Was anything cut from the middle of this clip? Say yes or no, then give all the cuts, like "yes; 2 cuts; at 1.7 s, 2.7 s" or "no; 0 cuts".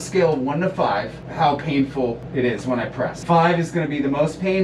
yes; 3 cuts; at 1.2 s, 2.2 s, 3.2 s